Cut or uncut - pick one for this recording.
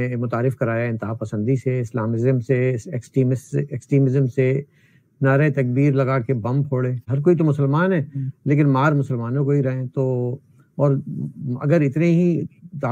cut